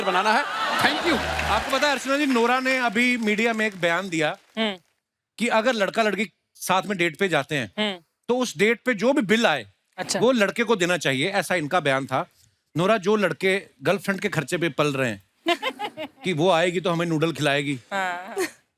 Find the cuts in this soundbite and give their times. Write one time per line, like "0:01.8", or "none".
0:01.4

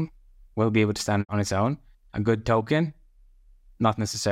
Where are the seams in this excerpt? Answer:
none

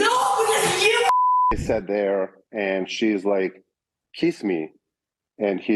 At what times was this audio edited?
0:01.5

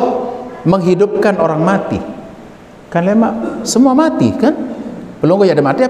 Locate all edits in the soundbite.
none

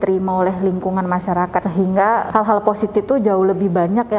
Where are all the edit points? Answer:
0:01.6

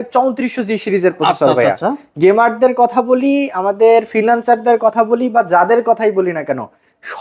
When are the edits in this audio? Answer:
none

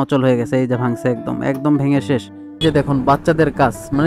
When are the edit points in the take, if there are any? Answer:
0:02.6

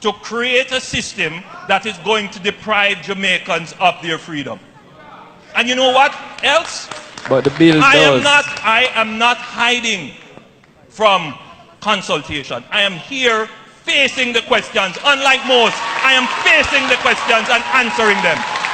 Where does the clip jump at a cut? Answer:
none

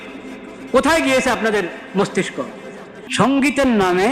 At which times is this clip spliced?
0:03.1

